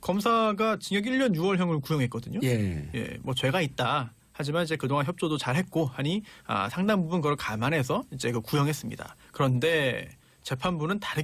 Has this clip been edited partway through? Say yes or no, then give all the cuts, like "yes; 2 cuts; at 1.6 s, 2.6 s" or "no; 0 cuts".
no; 0 cuts